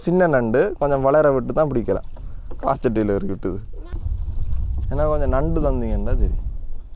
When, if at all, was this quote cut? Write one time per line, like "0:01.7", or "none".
none